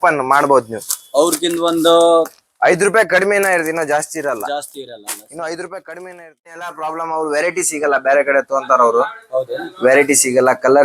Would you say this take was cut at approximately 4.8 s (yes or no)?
no